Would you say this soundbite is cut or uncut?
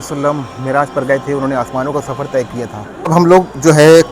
cut